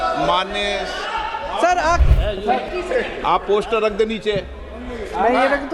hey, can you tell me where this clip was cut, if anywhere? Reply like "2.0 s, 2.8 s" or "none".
2.0 s